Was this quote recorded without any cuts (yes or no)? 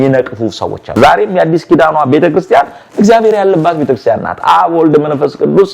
no